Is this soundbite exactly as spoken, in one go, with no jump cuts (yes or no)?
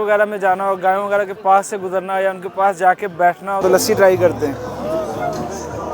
no